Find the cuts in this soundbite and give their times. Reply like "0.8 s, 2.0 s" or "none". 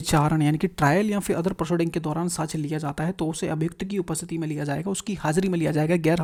none